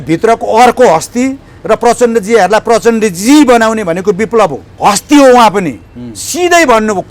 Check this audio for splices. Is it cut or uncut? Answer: cut